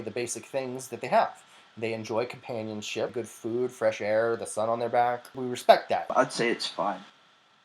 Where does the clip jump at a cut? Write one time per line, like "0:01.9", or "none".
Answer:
0:03.1
0:05.3
0:06.1